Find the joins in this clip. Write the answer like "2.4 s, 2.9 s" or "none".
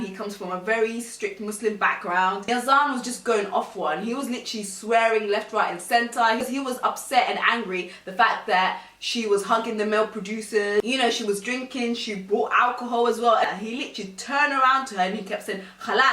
2.5 s, 6.4 s, 13.4 s